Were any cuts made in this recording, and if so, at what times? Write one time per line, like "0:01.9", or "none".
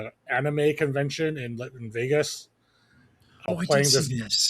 0:03.5